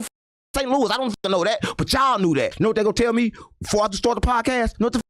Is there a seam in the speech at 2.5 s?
yes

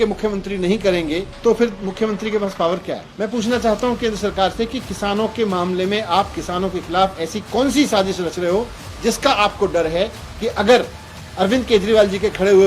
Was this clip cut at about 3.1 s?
yes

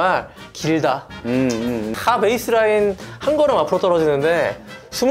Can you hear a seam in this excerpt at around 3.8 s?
no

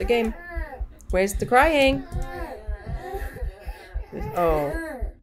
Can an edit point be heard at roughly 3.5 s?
yes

